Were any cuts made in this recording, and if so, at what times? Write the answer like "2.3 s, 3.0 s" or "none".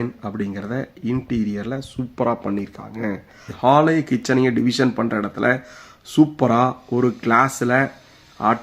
3.5 s